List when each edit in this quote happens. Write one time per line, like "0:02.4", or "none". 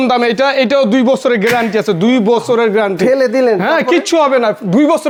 none